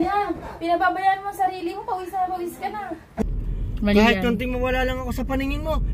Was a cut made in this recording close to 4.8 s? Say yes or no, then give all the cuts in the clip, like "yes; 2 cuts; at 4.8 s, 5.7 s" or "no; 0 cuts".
no; 1 cut; at 3.2 s